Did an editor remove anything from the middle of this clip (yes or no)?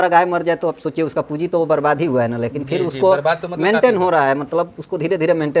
no